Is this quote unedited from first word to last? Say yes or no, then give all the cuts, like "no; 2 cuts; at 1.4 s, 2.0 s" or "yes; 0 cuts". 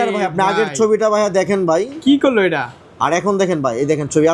yes; 0 cuts